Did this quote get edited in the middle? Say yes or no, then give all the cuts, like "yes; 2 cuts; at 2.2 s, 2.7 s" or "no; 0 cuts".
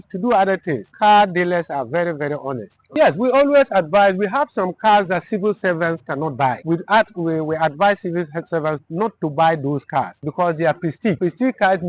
yes; 5 cuts; at 0.9 s, 2.8 s, 6.6 s, 10.2 s, 11.2 s